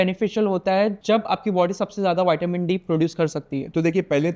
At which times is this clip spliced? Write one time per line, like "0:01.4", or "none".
0:01.0